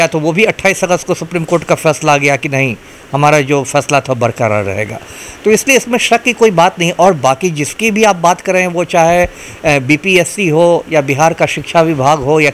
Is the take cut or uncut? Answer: uncut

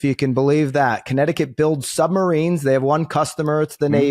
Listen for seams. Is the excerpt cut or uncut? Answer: uncut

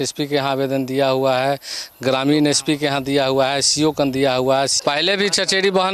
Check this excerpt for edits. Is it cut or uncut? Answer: cut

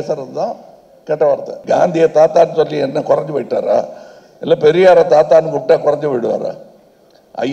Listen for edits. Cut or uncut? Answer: cut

